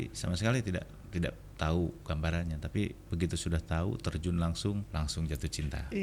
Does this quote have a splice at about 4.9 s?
yes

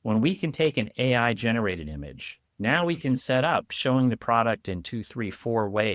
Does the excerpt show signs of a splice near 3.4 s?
no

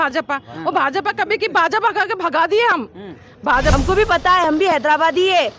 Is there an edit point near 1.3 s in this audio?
no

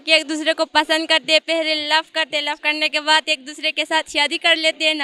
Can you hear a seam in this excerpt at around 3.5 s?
no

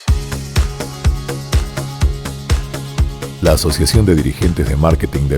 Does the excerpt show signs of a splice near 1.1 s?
no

